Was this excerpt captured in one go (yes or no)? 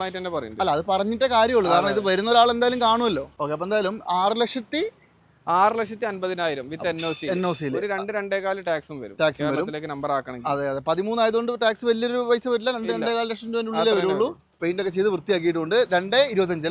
no